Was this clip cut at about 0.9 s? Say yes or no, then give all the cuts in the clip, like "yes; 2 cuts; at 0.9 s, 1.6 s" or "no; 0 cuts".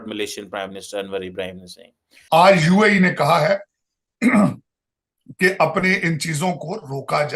no; 1 cut; at 2.1 s